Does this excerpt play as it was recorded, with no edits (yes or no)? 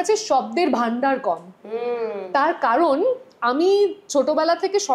yes